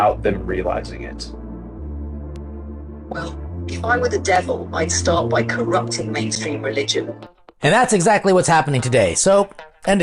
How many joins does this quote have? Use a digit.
1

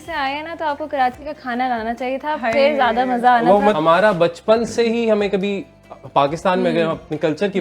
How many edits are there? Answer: 1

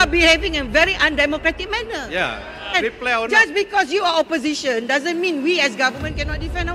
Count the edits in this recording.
1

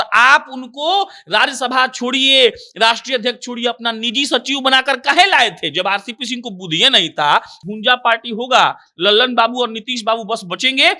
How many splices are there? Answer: 1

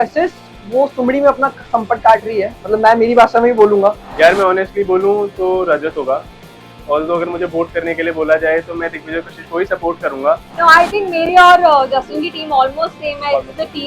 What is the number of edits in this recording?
2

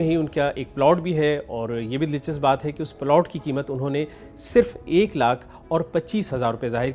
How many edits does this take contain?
0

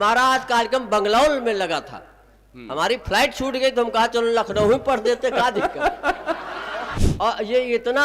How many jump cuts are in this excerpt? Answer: 1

